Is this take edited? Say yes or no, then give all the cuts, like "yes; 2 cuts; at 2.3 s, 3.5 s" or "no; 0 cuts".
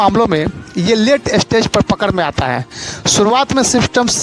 no; 0 cuts